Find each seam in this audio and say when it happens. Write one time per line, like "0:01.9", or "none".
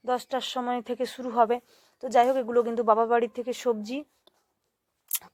none